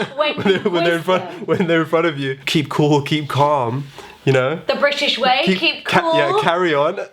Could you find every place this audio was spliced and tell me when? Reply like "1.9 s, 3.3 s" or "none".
2.4 s